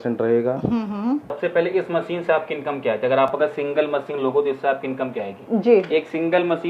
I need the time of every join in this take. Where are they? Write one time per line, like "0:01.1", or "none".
0:01.4